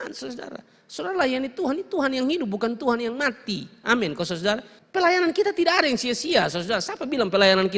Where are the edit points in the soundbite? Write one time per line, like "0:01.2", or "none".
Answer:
0:04.8